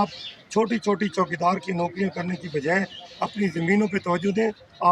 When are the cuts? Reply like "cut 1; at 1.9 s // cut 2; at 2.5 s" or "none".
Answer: none